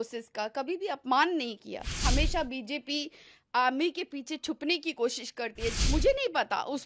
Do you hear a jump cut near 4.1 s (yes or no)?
no